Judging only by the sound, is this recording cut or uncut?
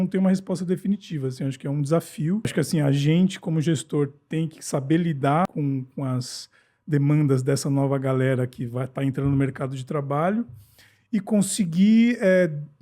cut